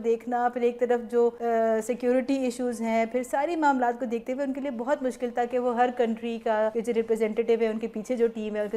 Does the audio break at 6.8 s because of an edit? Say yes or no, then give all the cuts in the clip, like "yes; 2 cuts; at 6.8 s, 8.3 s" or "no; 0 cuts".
yes; 2 cuts; at 1.4 s, 6.8 s